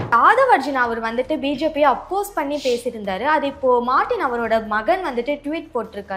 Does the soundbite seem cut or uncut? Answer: uncut